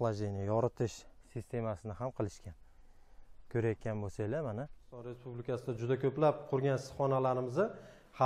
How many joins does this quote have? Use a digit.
1